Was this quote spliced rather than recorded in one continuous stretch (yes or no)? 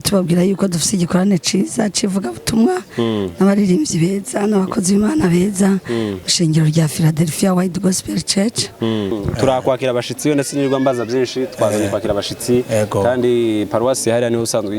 no